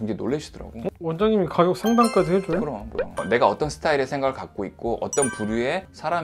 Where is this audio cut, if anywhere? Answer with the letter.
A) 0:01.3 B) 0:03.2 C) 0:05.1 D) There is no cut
B